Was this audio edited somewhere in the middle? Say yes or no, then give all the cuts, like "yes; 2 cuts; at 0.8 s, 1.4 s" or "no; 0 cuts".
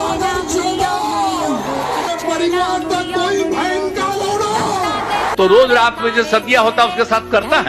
no; 0 cuts